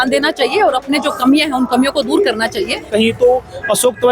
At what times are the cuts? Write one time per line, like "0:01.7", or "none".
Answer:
0:02.9